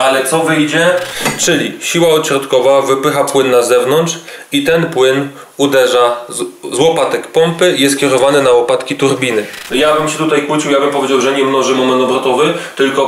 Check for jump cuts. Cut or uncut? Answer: cut